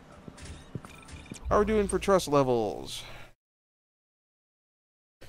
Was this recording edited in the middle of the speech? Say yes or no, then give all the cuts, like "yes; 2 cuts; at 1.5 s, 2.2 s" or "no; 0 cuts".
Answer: no; 0 cuts